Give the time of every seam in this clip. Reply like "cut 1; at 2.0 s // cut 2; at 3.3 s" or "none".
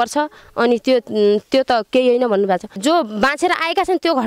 cut 1; at 2.8 s